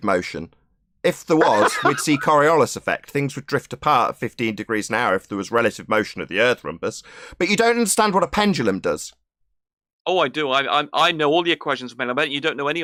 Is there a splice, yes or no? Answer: no